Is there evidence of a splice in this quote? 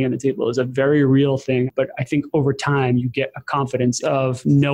yes; 2 cuts; at 1.7 s, 4.0 s

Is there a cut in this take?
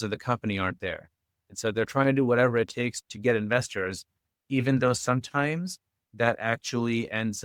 no; 0 cuts

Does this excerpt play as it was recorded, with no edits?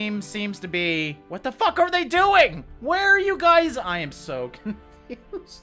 no; 1 cut; at 1.2 s

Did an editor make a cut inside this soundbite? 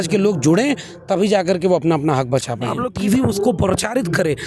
yes; 1 cut; at 2.8 s

